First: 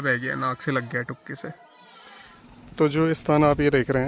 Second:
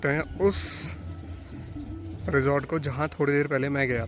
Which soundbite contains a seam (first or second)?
first